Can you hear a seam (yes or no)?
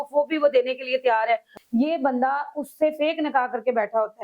yes